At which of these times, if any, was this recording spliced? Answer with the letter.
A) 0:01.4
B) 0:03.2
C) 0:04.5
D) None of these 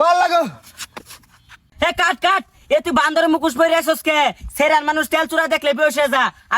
A